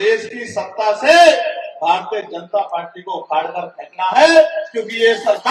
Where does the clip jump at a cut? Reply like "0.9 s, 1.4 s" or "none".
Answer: none